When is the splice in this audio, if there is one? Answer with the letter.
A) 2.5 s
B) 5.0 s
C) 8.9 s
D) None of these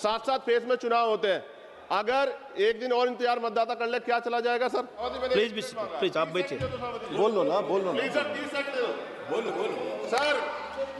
B